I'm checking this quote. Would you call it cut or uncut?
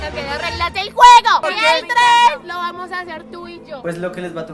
cut